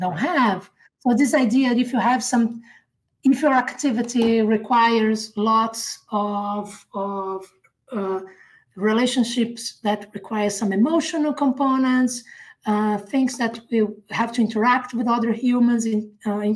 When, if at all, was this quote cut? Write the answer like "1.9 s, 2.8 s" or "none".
none